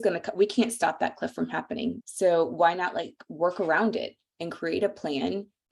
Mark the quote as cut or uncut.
cut